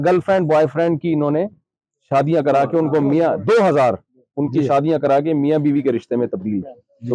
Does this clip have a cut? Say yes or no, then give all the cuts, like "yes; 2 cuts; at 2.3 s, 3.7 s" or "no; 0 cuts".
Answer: no; 0 cuts